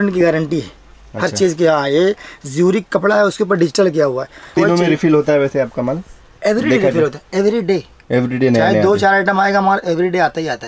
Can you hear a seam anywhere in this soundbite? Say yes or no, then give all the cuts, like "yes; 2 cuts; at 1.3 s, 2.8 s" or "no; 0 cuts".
yes; 1 cut; at 4.6 s